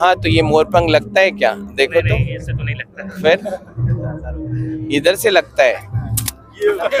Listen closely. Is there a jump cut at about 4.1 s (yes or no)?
no